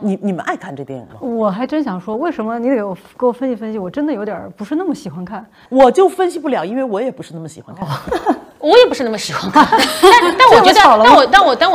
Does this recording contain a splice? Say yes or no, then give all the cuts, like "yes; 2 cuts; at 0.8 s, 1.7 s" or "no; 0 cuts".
no; 0 cuts